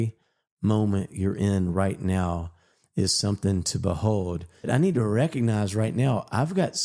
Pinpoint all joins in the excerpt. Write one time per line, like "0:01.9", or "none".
0:04.7